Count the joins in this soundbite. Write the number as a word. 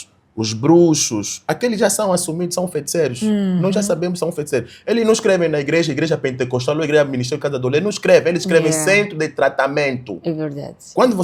zero